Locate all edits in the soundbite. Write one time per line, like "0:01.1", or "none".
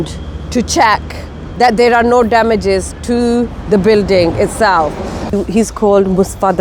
0:05.3